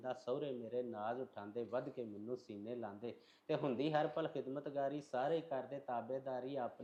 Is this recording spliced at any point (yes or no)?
no